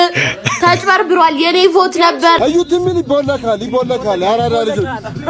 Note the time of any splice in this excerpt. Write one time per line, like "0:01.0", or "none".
0:02.4

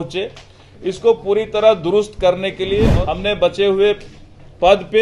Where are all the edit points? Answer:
0:02.9

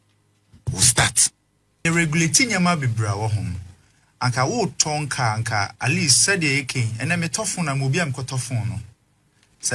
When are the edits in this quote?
0:01.8

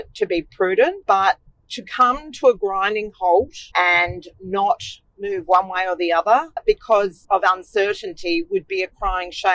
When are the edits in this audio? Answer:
0:01.0
0:03.6
0:06.5
0:07.2

